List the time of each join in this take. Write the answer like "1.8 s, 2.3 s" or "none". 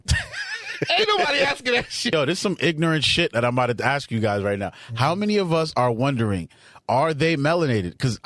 2.1 s